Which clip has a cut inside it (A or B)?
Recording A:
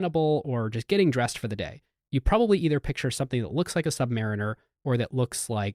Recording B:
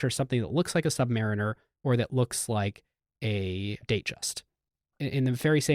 B